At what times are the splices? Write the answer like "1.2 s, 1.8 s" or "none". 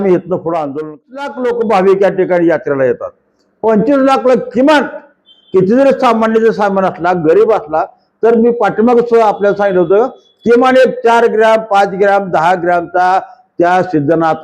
1.2 s